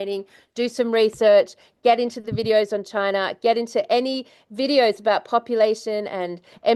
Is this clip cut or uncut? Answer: uncut